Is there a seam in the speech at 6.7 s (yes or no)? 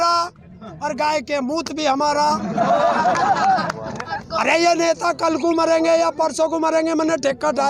no